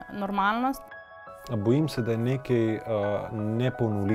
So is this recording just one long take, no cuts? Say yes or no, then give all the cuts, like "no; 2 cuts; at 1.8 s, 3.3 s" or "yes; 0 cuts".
no; 1 cut; at 1.0 s